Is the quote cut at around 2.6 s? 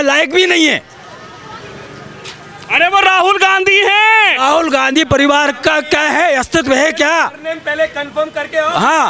no; 0 cuts

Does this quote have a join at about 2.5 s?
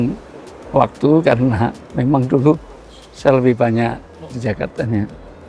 no; 1 cut; at 4.4 s

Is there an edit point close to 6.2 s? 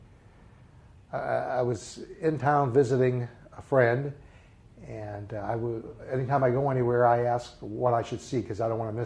yes; 1 cut; at 6.2 s

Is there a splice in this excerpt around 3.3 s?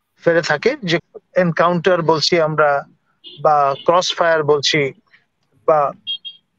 no; 1 cut; at 1.0 s

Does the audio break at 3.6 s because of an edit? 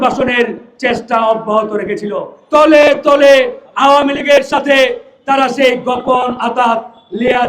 no; 1 cut; at 2.3 s

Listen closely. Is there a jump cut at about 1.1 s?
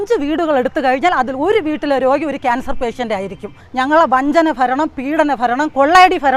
no; 1 cut; at 3.6 s

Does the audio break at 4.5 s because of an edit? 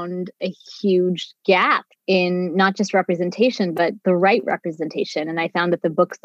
no; 1 cut; at 1.9 s

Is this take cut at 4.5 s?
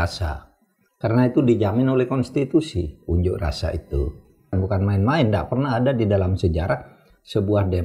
yes; 1 cut; at 4.5 s

